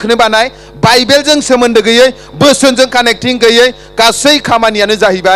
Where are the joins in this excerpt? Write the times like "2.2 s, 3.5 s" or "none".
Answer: none